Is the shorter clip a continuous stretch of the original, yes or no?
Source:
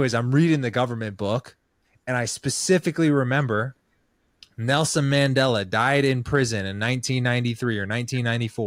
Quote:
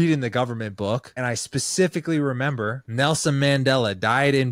no